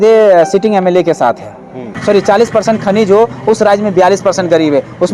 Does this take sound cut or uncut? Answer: cut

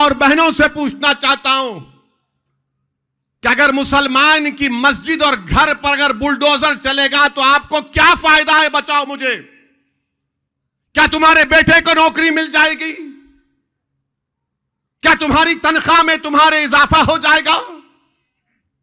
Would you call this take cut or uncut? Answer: uncut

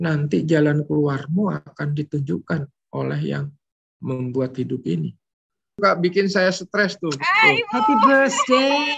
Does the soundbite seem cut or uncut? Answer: cut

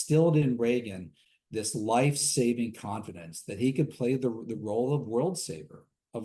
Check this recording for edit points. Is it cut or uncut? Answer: uncut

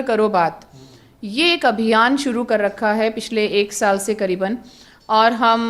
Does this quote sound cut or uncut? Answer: uncut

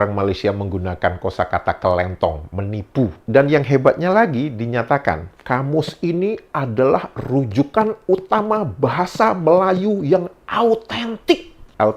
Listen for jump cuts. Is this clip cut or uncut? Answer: cut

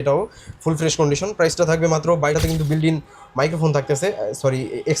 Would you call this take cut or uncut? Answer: cut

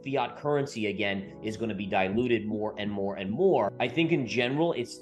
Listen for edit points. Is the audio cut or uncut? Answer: cut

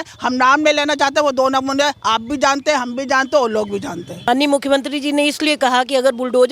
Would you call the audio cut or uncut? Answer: cut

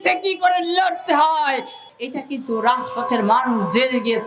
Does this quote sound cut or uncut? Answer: cut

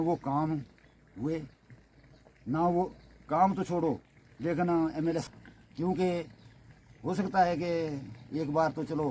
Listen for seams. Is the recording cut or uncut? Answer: cut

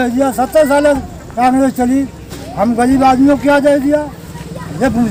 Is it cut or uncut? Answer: uncut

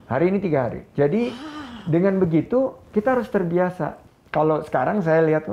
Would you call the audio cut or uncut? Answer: cut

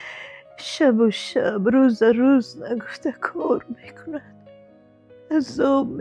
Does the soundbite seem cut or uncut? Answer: uncut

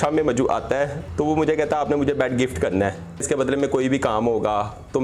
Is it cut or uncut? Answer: cut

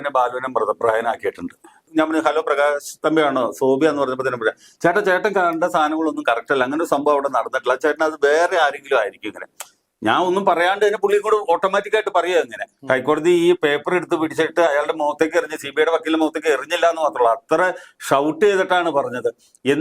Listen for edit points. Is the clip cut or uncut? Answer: cut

